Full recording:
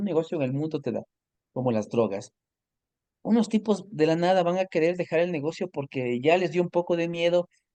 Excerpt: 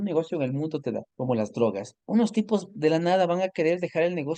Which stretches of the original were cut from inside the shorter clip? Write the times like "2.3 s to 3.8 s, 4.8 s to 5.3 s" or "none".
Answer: 1.1 s to 1.5 s, 2.3 s to 3.1 s